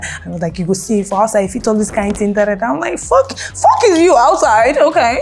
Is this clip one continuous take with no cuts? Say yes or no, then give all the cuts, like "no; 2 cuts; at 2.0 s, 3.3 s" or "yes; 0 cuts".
yes; 0 cuts